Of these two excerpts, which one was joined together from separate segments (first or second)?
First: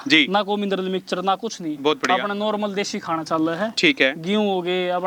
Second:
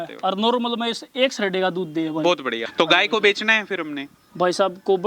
second